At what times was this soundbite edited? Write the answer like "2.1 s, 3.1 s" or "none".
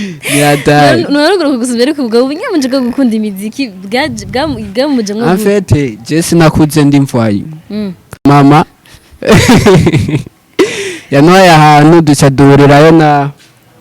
8.2 s